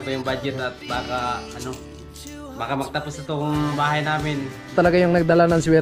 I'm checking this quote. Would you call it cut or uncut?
cut